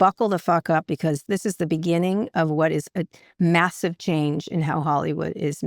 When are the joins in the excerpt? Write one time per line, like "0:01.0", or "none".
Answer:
0:01.2